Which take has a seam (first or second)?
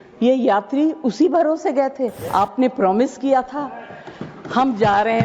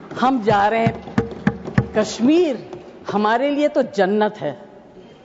first